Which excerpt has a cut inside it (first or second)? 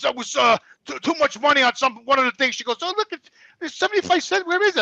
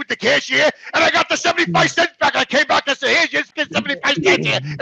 second